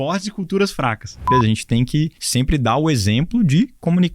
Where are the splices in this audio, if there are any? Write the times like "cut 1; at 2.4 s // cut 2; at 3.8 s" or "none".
cut 1; at 1.3 s // cut 2; at 2.2 s

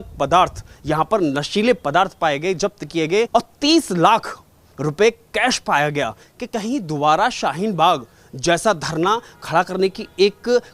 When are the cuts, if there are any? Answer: cut 1; at 3.3 s // cut 2; at 6.2 s

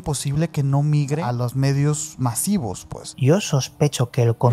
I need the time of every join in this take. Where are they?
cut 1; at 1.3 s // cut 2; at 3.1 s

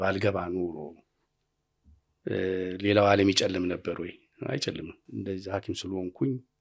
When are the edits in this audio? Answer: cut 1; at 5.0 s

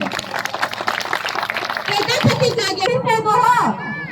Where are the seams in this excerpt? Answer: cut 1; at 2.9 s

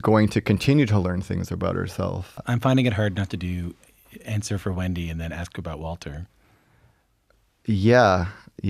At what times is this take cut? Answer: cut 1; at 2.4 s

